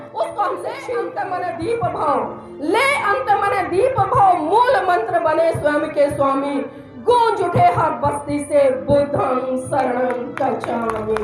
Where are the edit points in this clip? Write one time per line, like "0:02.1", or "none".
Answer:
0:01.1